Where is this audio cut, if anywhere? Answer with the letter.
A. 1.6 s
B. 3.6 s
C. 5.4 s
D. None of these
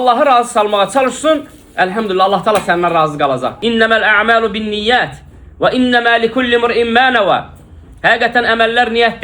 B